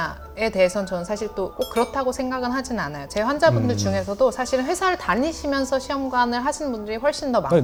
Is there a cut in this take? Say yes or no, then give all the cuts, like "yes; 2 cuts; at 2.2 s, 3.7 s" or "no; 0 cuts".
no; 0 cuts